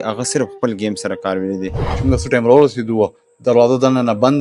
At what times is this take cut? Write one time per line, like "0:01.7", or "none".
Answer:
0:02.0

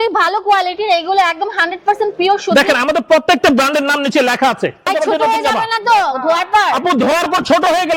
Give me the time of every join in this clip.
0:04.9

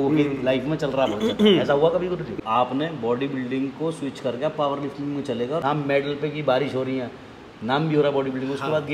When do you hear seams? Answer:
0:02.3
0:05.6

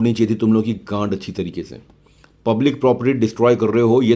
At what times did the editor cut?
none

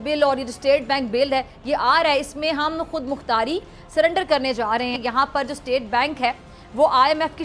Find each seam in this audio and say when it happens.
0:05.0

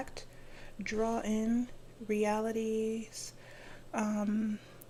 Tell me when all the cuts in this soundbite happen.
none

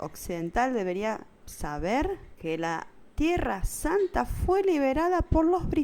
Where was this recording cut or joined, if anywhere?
0:02.3

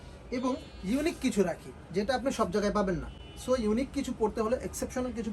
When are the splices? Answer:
none

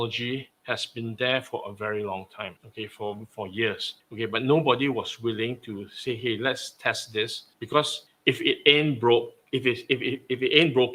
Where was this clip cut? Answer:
none

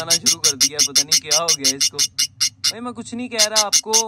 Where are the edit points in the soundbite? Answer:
none

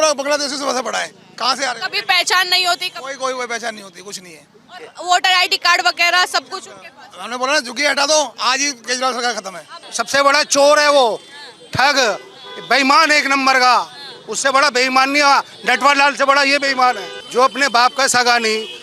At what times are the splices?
0:09.8
0:17.1

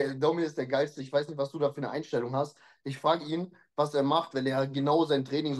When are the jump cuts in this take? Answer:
none

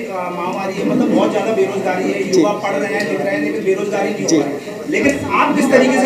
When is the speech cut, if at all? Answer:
none

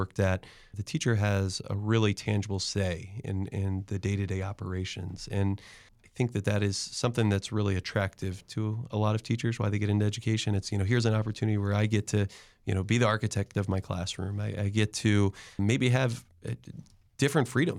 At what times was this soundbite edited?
none

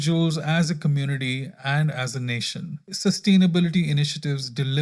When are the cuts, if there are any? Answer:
0:02.9

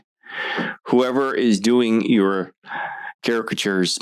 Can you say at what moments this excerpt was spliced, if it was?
none

